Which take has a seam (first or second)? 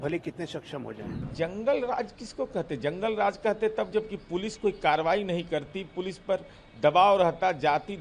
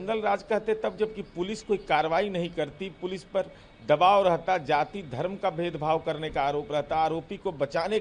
first